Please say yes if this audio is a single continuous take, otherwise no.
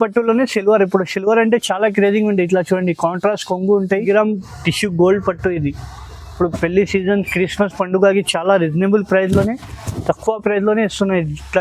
no